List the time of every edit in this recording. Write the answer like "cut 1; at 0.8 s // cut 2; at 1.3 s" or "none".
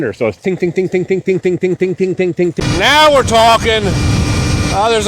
cut 1; at 2.6 s